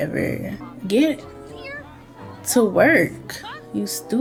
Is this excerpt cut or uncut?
uncut